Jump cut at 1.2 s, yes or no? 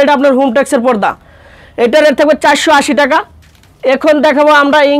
no